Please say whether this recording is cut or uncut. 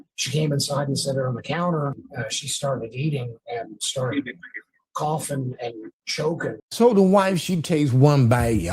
cut